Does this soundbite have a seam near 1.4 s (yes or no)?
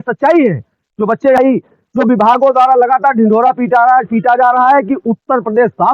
yes